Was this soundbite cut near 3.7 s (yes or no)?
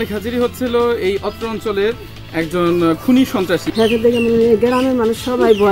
yes